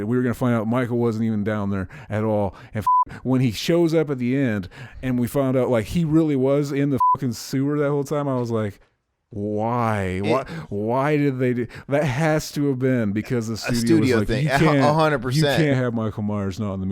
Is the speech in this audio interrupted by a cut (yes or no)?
yes